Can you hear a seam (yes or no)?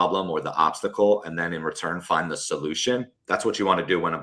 yes